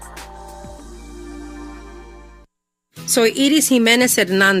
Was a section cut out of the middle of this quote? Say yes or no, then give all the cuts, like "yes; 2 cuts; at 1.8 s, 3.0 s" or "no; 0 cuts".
yes; 1 cut; at 2.0 s